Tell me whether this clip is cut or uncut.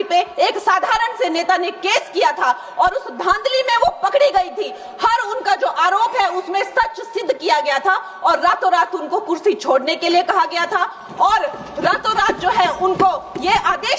uncut